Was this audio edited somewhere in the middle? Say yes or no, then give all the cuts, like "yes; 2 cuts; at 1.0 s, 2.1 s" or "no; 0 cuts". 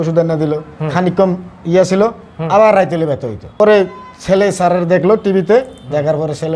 yes; 1 cut; at 3.4 s